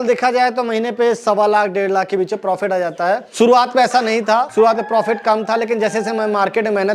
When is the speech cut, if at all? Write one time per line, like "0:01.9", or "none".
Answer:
0:03.3
0:04.5